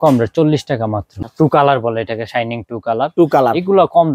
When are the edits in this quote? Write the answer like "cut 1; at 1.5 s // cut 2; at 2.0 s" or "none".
cut 1; at 1.1 s